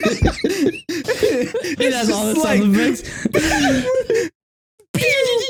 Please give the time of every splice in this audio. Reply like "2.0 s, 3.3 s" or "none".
none

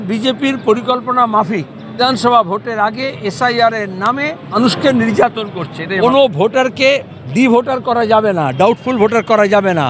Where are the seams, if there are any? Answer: 2.0 s, 4.6 s, 5.8 s

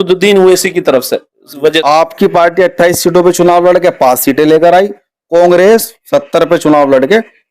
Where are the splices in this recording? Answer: 1.8 s

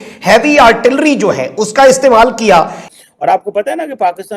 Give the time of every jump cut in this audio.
2.8 s

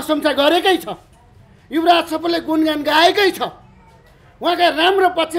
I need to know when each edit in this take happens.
none

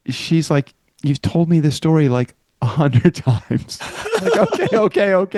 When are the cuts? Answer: none

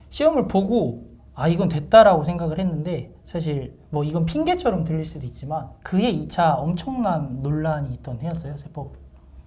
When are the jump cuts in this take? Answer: none

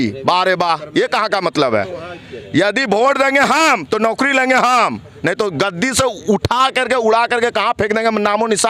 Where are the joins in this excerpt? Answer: none

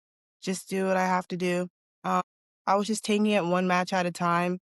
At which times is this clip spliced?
2.2 s

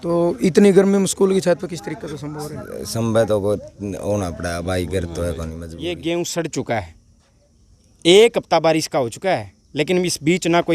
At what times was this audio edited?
5.6 s

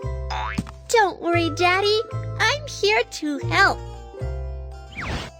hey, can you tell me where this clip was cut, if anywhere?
3.8 s

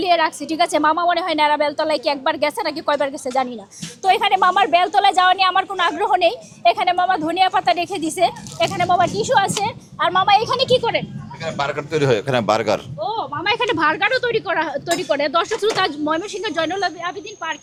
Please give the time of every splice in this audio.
none

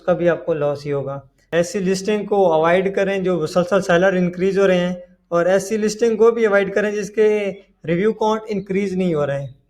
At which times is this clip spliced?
1.3 s

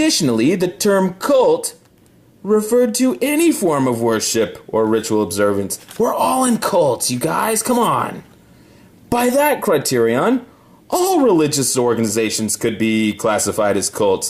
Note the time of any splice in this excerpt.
8.4 s

